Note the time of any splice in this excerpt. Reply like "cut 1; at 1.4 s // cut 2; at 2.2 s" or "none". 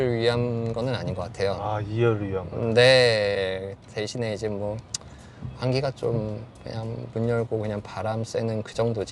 none